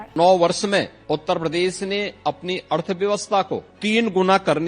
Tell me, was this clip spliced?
yes; 2 cuts; at 1.0 s, 3.7 s

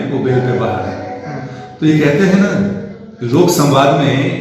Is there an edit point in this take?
no; 0 cuts

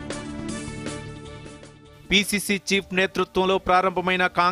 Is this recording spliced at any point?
yes; 1 cut; at 1.9 s

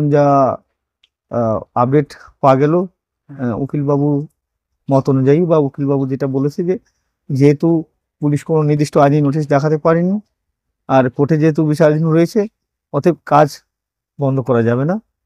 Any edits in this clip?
no; 0 cuts

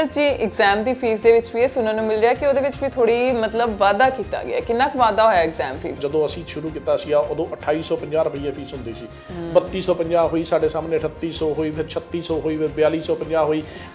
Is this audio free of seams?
no; 1 cut; at 6.0 s

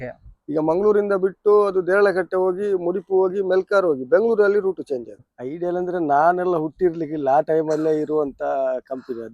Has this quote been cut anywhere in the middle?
yes; 1 cut; at 5.1 s

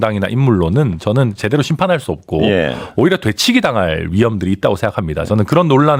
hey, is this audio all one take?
yes; 0 cuts

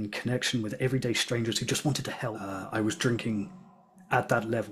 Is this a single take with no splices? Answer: no; 1 cut; at 2.4 s

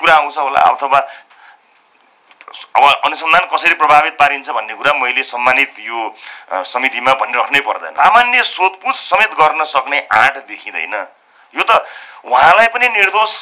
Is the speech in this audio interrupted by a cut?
yes; 1 cut; at 7.9 s

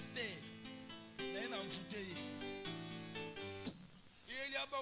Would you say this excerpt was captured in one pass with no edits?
no; 1 cut; at 3.7 s

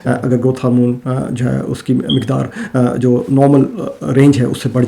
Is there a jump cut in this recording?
no; 0 cuts

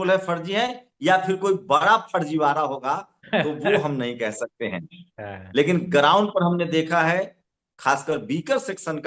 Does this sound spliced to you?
no; 0 cuts

